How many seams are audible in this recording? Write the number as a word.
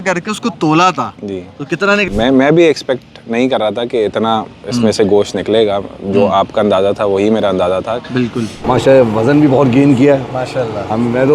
two